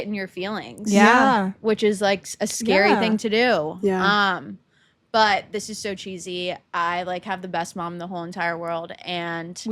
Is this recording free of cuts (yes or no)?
yes